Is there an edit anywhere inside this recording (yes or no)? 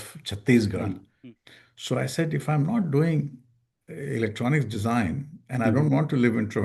yes